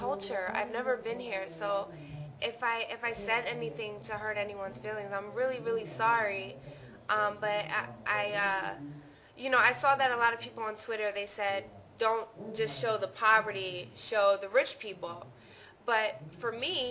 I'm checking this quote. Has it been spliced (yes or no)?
no